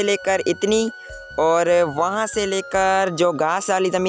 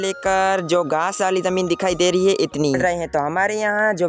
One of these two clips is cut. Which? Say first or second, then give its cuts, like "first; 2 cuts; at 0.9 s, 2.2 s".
second; 1 cut; at 2.8 s